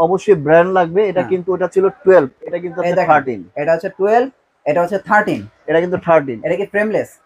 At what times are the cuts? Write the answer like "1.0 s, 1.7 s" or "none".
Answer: none